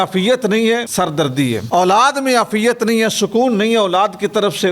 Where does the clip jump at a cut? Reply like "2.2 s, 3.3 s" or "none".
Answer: 1.4 s